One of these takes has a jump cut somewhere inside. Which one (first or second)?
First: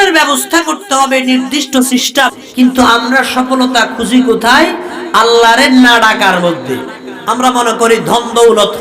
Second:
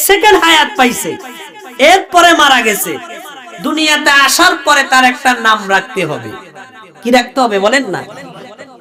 first